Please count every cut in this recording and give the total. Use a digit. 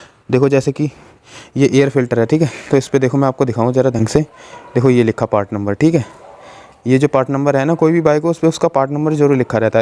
0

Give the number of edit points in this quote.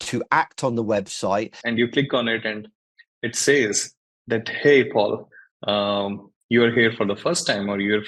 1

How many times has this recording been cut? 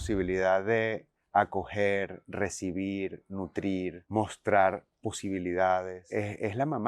2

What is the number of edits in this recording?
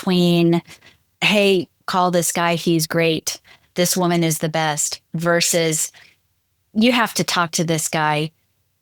0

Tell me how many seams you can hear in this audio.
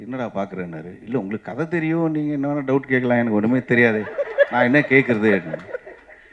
0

